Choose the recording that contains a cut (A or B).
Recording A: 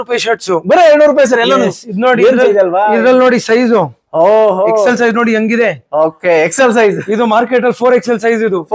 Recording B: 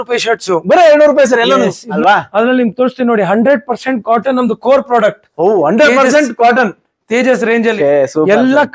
B